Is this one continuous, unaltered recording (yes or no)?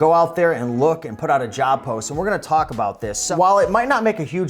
no